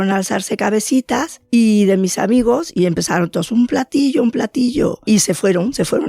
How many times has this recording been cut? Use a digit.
2